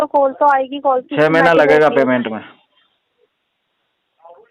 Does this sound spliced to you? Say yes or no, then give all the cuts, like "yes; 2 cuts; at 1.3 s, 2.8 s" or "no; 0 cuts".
no; 0 cuts